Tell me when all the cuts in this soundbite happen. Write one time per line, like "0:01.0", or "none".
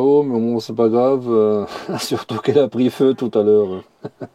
none